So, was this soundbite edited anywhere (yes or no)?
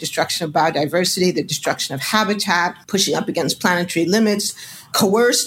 no